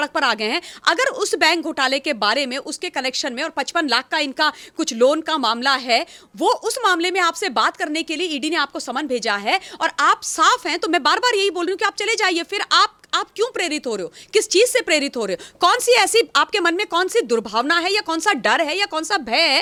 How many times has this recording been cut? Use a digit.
0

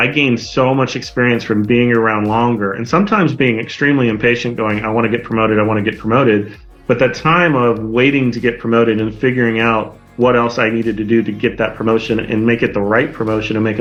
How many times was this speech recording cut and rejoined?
0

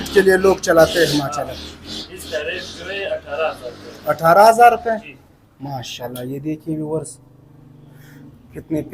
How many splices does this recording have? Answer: 0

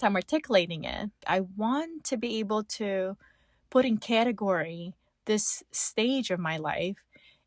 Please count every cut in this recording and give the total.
1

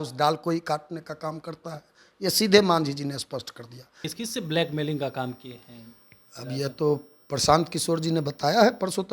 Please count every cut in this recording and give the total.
1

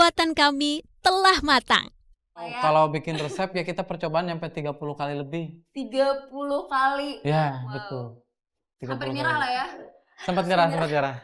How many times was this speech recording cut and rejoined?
1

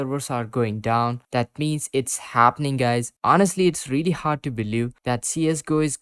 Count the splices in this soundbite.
1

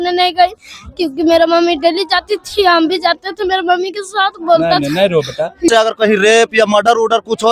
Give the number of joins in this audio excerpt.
1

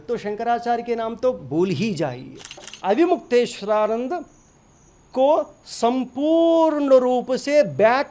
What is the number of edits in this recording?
1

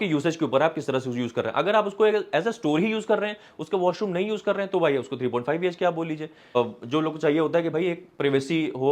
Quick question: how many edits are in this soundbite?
1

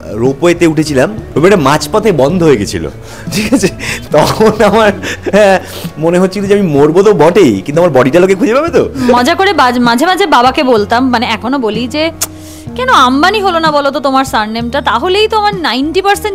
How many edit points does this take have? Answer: 3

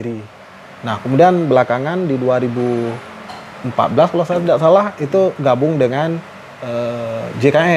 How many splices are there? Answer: 0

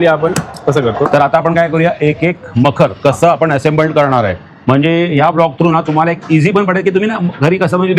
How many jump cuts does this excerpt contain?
1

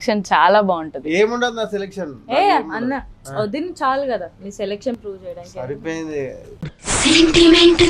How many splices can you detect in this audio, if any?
0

